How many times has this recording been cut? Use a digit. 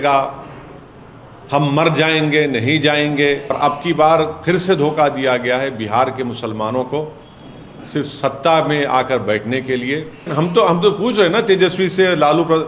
2